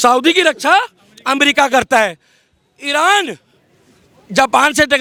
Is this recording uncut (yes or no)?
yes